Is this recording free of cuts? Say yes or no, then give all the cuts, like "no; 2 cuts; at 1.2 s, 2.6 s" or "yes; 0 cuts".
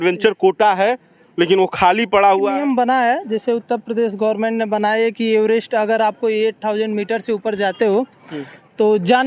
no; 1 cut; at 2.5 s